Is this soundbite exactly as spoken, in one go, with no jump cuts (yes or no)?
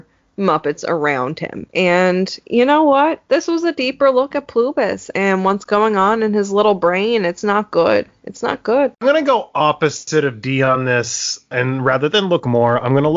no